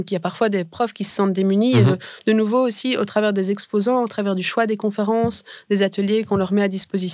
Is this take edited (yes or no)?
no